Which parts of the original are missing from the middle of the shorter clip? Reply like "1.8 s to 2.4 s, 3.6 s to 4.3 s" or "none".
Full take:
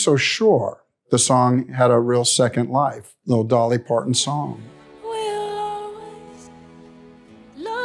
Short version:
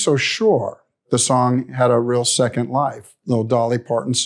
none